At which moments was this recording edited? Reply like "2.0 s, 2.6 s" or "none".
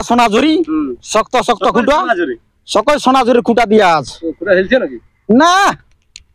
none